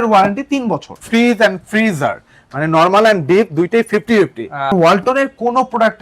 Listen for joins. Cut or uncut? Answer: cut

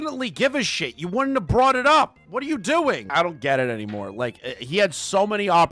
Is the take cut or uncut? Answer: cut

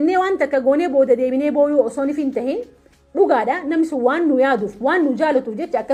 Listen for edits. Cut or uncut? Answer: uncut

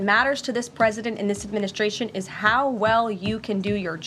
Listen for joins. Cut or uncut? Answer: uncut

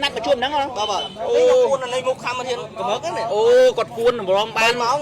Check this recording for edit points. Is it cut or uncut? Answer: uncut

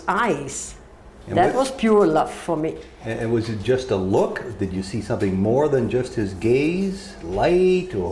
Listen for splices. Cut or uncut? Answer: uncut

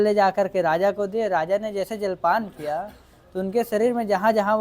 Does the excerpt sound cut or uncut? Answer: uncut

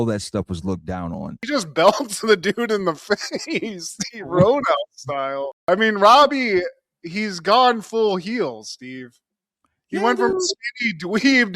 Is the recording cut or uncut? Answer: cut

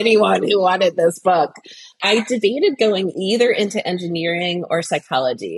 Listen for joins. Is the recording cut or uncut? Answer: cut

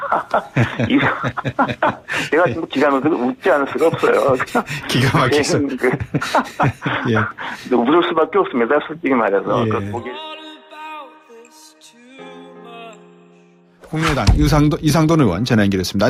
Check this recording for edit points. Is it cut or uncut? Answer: uncut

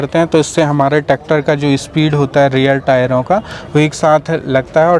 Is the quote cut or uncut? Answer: uncut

